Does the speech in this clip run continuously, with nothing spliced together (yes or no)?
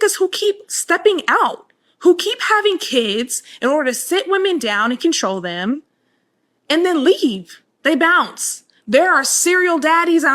no